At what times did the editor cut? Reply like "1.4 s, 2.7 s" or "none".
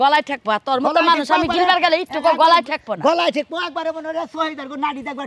none